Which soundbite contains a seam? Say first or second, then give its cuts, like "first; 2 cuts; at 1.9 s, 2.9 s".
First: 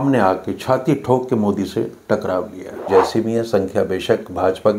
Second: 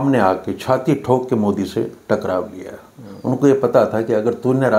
first; 1 cut; at 2.8 s